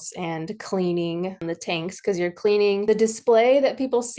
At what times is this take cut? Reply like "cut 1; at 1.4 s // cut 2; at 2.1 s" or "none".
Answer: cut 1; at 1.4 s // cut 2; at 2.8 s